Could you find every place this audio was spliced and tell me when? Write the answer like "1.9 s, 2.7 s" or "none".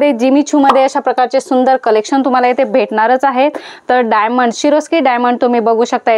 none